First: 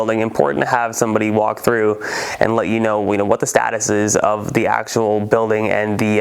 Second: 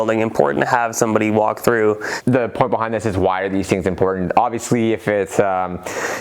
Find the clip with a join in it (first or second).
second